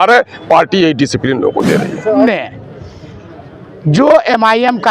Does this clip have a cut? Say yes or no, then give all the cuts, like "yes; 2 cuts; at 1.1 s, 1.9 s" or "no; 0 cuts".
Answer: yes; 1 cut; at 2.2 s